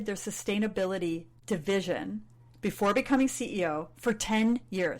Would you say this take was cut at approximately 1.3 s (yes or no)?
yes